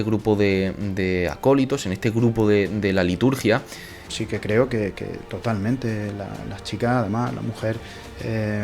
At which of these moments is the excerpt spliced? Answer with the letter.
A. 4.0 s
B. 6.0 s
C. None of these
A